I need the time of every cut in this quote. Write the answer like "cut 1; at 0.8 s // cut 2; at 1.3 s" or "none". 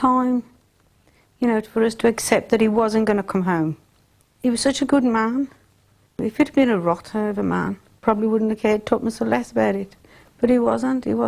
cut 1; at 4.2 s // cut 2; at 6.2 s // cut 3; at 8.0 s